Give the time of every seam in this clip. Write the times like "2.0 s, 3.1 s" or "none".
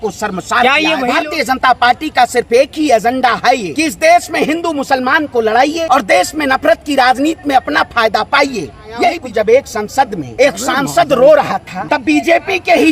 1.1 s, 3.7 s, 5.8 s, 9.2 s, 10.2 s, 11.7 s

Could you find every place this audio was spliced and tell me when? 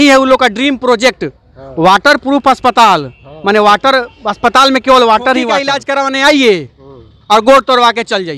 5.8 s

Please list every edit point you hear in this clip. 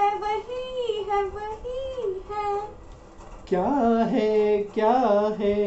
none

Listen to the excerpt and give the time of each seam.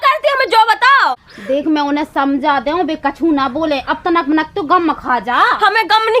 1.3 s

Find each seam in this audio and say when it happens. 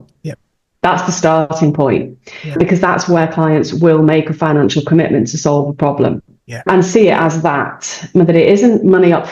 none

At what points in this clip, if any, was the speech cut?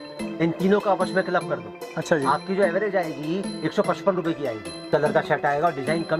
4.9 s

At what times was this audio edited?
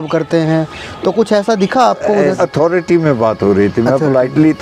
2.4 s

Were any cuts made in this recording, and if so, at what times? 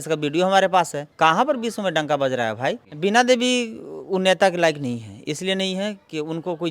1.0 s, 2.9 s

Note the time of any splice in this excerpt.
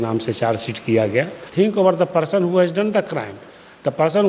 1.4 s

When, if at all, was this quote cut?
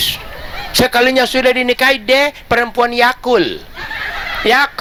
none

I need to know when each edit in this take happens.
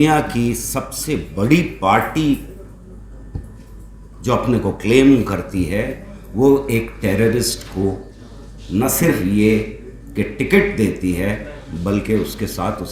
none

